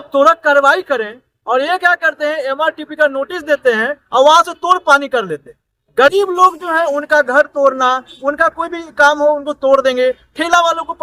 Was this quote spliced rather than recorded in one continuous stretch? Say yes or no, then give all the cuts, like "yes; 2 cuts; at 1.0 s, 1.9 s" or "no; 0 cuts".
no; 0 cuts